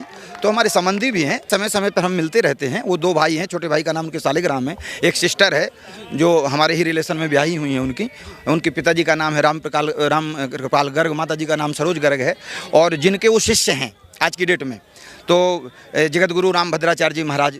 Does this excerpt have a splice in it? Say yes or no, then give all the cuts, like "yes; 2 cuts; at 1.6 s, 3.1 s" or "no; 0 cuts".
yes; 1 cut; at 1.4 s